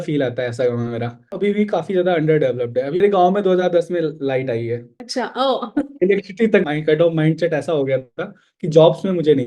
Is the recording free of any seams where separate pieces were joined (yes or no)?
no